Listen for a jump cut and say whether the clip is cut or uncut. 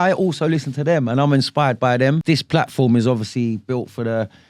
cut